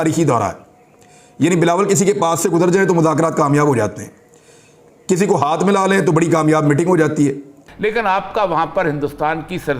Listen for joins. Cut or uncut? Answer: cut